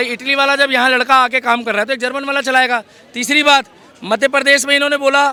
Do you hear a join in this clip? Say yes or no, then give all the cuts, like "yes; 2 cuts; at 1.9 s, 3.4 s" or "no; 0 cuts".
no; 0 cuts